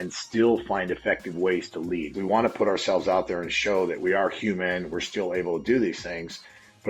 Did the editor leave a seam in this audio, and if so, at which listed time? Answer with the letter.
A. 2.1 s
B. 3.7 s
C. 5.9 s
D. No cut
A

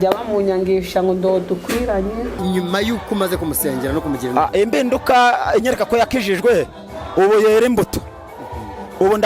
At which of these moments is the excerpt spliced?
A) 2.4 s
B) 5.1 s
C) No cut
A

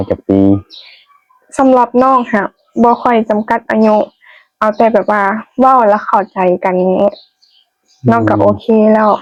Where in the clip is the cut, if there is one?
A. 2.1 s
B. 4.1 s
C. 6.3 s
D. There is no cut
D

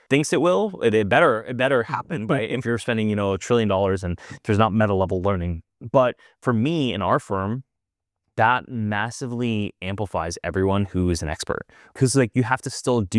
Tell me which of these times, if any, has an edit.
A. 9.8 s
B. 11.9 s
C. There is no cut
B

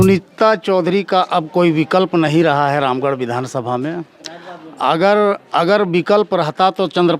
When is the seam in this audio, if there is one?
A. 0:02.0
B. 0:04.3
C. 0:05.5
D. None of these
D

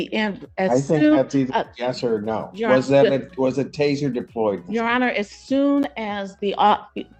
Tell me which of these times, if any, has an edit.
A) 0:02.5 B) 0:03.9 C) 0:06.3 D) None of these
D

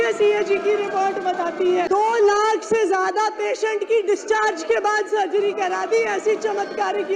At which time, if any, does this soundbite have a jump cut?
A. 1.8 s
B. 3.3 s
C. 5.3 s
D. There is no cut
A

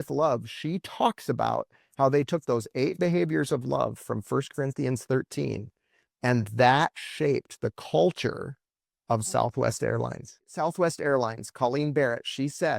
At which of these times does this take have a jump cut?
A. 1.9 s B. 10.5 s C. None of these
B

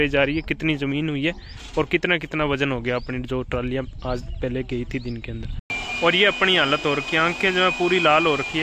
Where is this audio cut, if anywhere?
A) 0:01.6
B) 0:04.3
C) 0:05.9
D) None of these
D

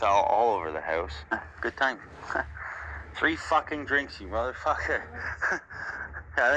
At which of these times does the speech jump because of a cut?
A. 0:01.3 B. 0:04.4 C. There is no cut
A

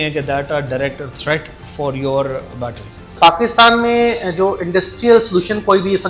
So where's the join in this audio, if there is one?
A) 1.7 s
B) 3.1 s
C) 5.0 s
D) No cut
B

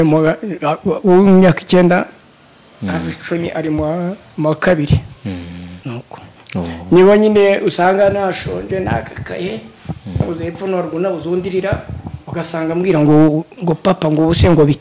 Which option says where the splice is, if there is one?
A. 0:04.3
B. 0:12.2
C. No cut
C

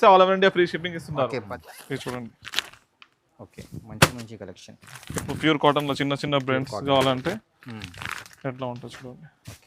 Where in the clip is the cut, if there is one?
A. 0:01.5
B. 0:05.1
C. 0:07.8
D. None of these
A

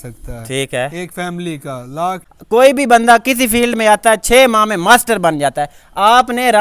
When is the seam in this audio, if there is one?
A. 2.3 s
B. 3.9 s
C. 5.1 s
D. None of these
A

